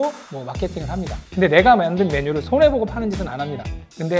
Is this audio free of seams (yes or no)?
no